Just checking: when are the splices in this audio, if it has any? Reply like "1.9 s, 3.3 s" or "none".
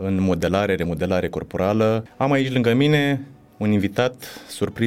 2.1 s